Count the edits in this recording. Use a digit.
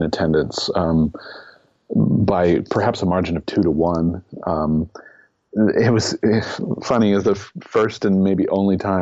0